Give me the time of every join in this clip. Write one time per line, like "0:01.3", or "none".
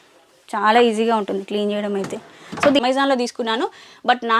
0:02.8